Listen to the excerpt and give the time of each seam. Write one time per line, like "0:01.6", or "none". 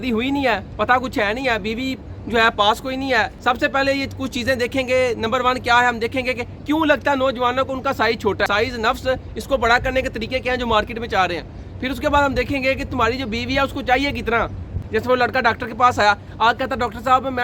0:03.3
0:08.5
0:14.7